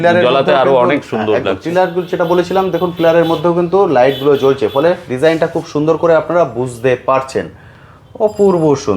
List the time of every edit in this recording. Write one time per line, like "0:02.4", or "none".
none